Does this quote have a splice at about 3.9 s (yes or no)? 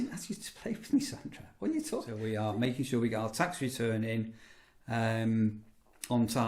no